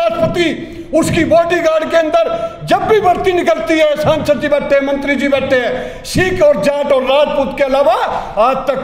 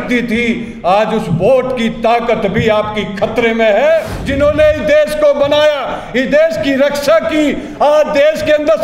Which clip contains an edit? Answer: second; 1 cut; at 4.2 s

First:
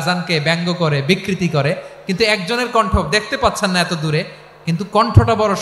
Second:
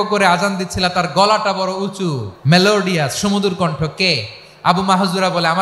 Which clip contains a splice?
second; 1 cut; at 2.3 s

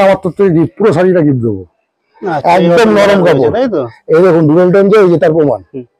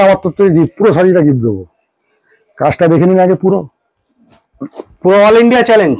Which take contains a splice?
first; 1 cut; at 2.2 s

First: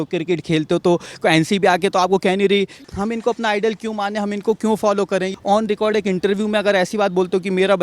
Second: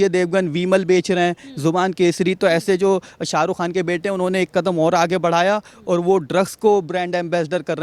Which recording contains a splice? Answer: first; 2 cuts; at 2.8 s, 5.3 s

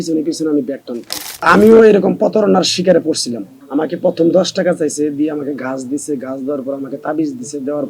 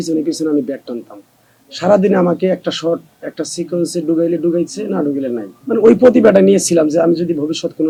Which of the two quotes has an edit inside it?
first; 1 cut; at 1.5 s

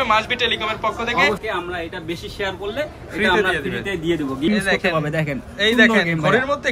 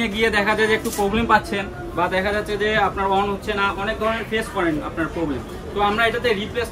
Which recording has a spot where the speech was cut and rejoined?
first; 2 cuts; at 1.4 s, 4.5 s

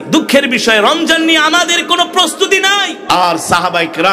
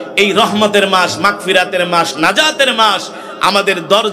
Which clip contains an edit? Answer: first; 1 cut; at 3.1 s

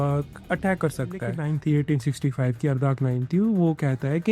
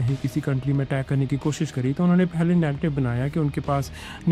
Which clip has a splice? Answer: first; 1 cut; at 1.4 s

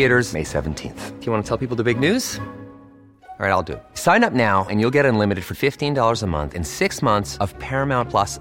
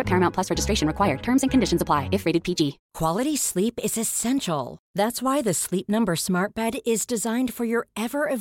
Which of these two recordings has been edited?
second; 1 cut; at 2.9 s

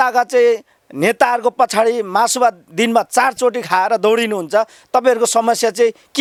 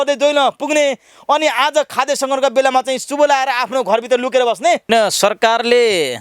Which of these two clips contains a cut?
second; 1 cut; at 4.8 s

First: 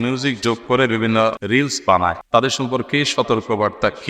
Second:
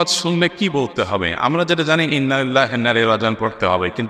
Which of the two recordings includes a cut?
first; 2 cuts; at 1.4 s, 2.2 s

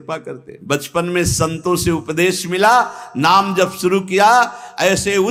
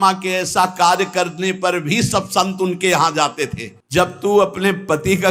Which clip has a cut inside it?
second; 1 cut; at 3.7 s

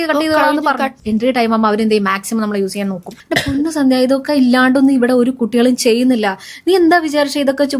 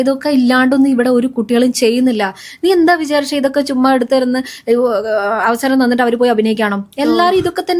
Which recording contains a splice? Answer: first; 2 cuts; at 1.0 s, 3.1 s

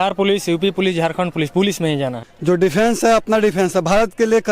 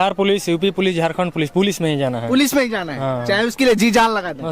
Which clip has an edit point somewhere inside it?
first; 1 cut; at 2.2 s

